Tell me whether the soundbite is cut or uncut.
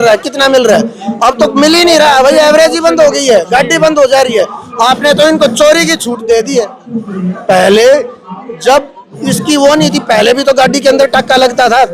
uncut